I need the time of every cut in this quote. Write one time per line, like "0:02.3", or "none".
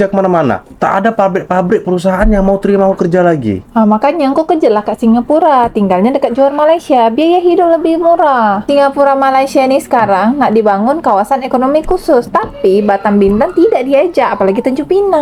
none